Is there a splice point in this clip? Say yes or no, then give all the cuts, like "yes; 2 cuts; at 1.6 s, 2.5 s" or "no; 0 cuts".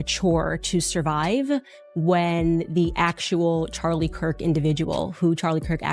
no; 0 cuts